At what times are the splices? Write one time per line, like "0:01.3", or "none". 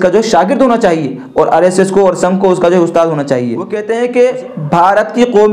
0:03.7